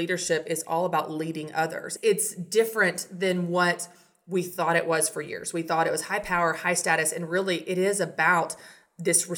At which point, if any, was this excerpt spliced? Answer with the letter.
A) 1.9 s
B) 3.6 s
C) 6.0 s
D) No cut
A